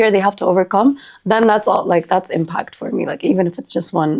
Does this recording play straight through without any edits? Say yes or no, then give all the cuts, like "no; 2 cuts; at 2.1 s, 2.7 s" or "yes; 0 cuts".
yes; 0 cuts